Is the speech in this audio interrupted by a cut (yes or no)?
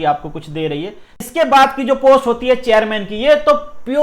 yes